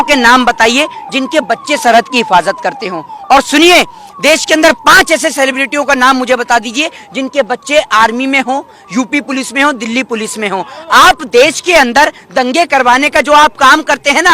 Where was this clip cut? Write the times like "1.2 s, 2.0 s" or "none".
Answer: none